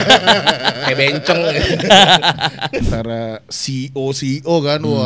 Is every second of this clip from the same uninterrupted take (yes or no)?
no